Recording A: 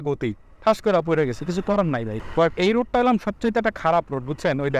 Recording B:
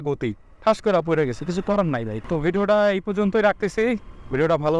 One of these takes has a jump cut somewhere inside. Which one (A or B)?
A